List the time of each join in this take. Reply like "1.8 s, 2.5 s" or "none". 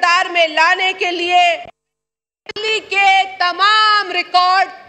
none

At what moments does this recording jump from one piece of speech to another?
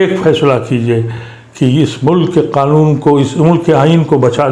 none

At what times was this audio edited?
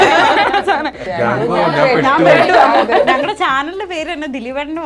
1.0 s

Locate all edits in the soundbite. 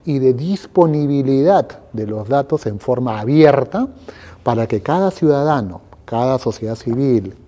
none

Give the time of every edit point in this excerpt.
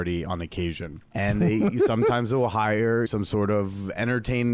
1.0 s, 3.1 s

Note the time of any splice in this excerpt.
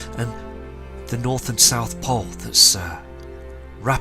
1.1 s

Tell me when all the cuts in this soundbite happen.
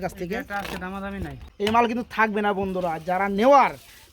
1.4 s

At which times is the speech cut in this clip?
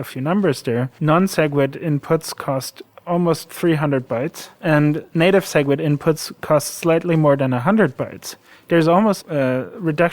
0.9 s, 4.5 s, 9.2 s

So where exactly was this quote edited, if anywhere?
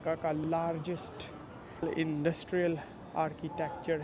1.8 s

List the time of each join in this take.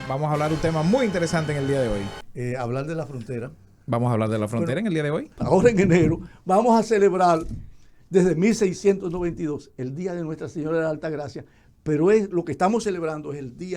2.2 s, 5.4 s

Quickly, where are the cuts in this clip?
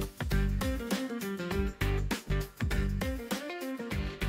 none

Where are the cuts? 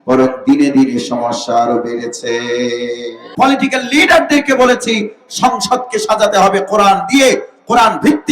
3.2 s

